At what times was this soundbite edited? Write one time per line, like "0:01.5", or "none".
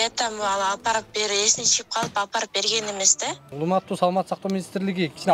0:03.4